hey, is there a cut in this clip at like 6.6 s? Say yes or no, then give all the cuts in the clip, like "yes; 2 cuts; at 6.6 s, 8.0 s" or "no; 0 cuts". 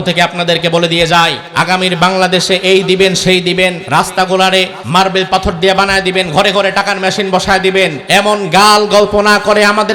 no; 4 cuts; at 1.4 s, 3.8 s, 4.8 s, 8.0 s